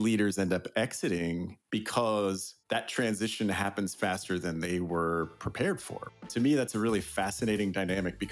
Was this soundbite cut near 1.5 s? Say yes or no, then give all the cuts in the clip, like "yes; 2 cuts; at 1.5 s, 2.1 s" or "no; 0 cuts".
yes; 3 cuts; at 1.5 s, 2.5 s, 6.2 s